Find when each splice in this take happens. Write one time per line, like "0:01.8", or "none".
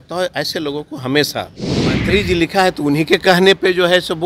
0:02.0